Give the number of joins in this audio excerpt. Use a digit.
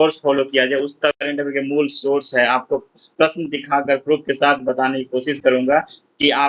1